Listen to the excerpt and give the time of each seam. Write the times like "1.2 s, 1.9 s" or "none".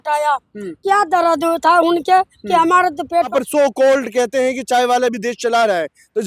3.3 s